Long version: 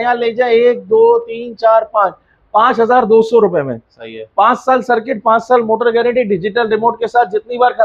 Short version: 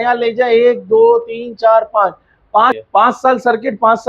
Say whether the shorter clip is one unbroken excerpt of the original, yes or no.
no